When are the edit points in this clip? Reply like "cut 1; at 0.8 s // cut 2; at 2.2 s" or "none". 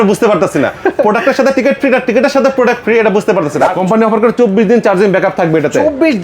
cut 1; at 3.8 s